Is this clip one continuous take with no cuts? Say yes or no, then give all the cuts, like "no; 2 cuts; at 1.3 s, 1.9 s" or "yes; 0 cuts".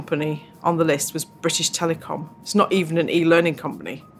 yes; 0 cuts